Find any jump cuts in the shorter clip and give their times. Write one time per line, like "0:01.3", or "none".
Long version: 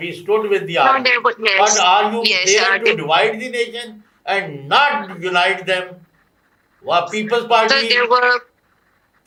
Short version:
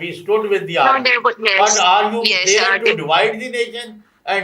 none